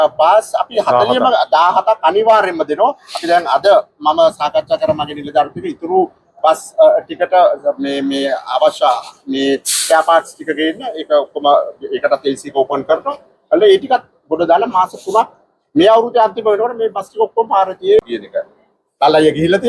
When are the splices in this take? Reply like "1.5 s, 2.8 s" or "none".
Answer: 18.0 s